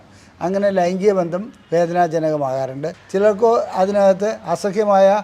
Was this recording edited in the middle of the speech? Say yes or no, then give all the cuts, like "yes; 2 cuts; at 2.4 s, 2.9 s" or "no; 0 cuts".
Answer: yes; 1 cut; at 2.9 s